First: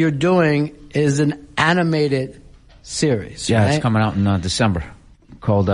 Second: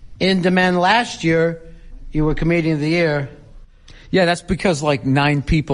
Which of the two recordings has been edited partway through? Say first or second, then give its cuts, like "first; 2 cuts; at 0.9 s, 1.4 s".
first; 1 cut; at 2.2 s